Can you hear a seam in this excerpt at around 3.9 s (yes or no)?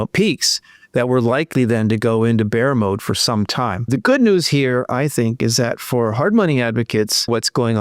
yes